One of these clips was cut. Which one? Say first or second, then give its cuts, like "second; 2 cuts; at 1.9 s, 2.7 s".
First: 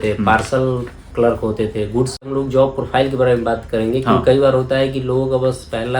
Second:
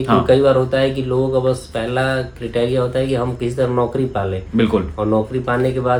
first; 1 cut; at 2.3 s